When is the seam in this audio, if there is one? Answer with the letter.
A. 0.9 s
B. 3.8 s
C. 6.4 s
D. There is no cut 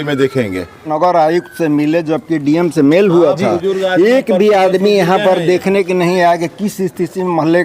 A